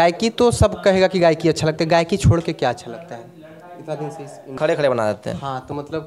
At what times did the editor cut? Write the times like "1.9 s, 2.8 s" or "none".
4.6 s